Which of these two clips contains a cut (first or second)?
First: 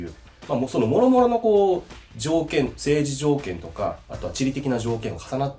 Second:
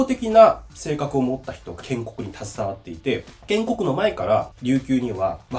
second